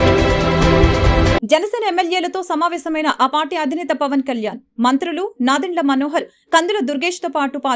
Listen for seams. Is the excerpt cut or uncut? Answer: cut